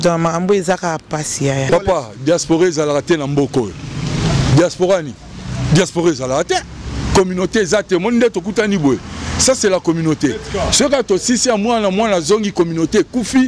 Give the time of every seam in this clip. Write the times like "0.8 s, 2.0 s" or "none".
1.7 s